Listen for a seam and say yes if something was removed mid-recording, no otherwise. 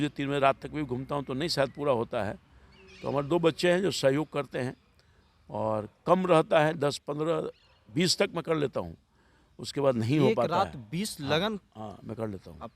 no